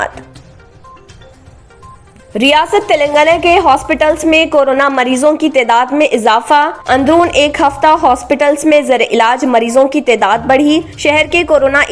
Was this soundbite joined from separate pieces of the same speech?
no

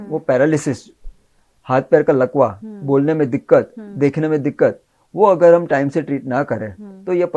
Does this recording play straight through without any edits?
yes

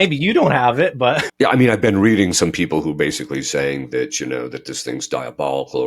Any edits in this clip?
yes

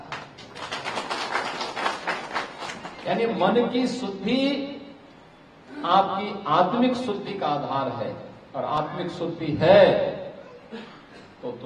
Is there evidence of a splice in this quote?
no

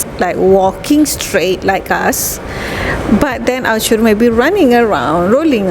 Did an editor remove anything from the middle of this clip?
no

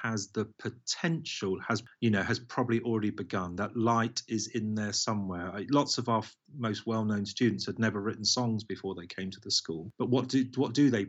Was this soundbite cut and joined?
yes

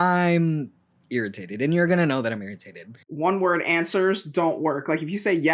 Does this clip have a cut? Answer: yes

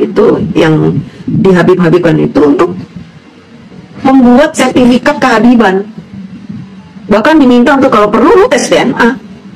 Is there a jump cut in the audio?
no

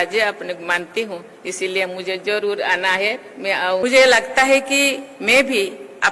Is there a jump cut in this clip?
yes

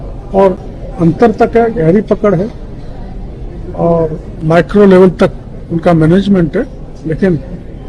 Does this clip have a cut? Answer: yes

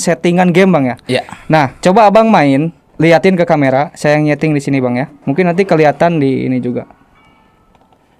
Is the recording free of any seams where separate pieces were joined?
no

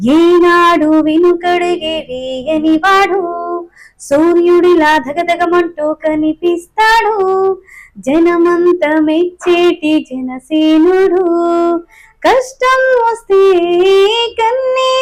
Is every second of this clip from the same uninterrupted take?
yes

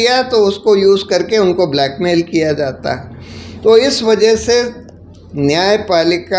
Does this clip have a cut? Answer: no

